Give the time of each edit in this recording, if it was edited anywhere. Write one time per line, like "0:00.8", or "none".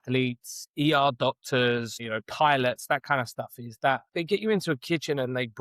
0:04.1